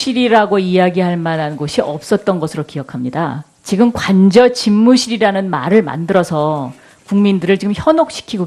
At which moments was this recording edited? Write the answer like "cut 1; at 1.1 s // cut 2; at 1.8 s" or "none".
none